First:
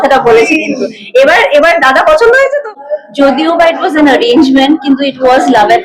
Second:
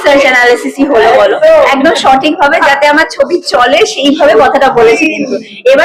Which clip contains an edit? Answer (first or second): first